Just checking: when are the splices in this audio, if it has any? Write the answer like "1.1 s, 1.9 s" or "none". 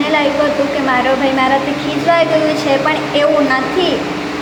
none